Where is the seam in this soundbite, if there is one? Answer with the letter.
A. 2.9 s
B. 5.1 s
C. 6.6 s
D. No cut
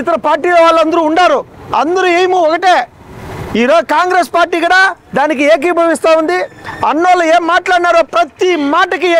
D